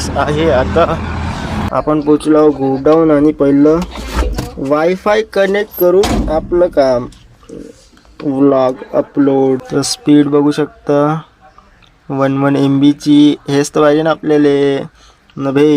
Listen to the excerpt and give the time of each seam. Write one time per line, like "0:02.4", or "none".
0:01.6
0:09.6